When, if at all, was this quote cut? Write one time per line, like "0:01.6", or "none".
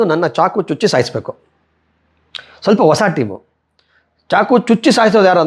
none